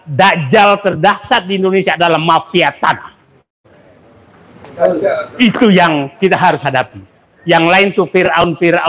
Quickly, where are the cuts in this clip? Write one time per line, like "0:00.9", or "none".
none